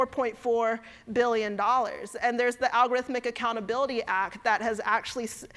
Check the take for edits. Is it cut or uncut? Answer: uncut